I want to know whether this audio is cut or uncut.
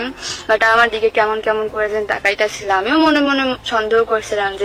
uncut